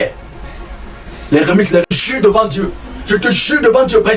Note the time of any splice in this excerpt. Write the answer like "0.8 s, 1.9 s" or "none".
1.9 s